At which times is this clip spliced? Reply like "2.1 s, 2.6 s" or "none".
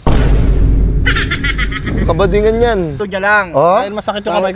3.0 s